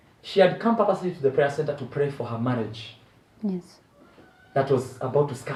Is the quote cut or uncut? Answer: uncut